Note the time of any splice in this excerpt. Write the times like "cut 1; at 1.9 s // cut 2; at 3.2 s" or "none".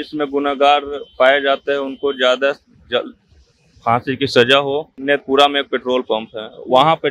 cut 1; at 5.0 s